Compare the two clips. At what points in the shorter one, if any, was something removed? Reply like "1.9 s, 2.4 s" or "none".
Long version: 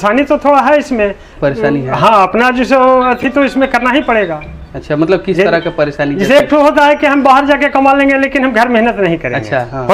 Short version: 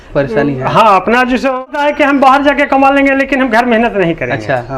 1.6 s